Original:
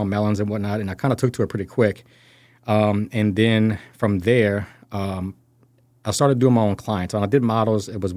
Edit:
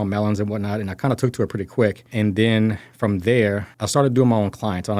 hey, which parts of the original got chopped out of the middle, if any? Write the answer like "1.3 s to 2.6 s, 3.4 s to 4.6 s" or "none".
2.1 s to 3.1 s, 4.7 s to 6.0 s